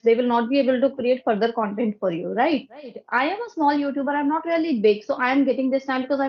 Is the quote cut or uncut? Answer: cut